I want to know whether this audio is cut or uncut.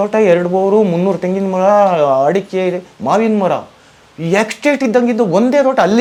uncut